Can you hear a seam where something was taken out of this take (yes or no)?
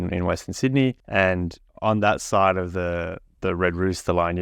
yes